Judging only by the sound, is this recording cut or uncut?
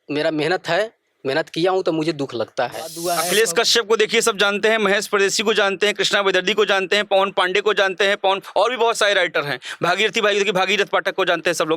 cut